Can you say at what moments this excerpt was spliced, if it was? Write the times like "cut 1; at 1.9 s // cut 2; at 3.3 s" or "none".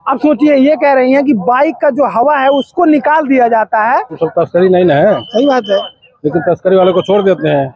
cut 1; at 4.2 s